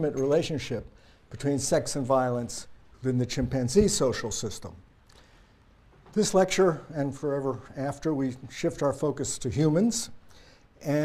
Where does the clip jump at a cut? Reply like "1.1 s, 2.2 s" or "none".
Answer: none